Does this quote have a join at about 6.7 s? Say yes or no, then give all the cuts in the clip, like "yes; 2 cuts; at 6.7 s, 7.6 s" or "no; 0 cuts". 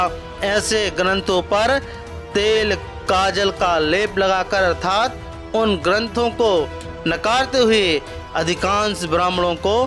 no; 1 cut; at 2.9 s